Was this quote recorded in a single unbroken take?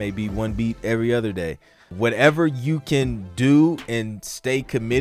no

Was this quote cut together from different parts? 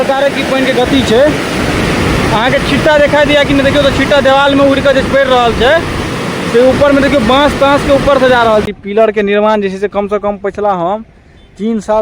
yes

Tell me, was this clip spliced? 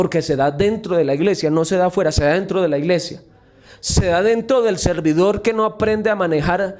no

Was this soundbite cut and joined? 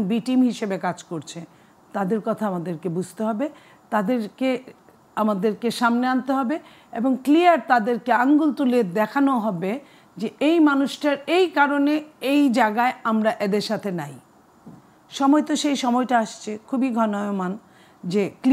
no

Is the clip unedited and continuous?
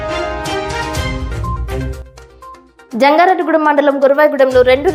yes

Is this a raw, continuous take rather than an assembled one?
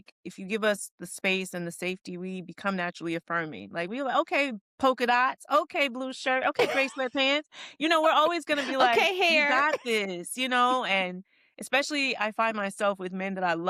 yes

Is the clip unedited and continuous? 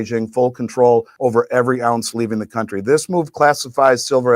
no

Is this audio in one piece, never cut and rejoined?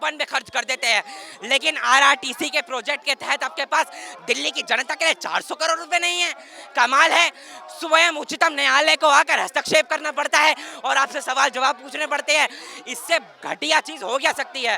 yes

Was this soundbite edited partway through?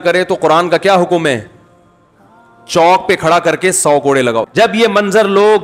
yes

